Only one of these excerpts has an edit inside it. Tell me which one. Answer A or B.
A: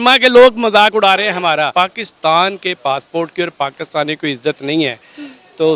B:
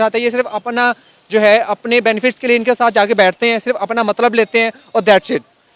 A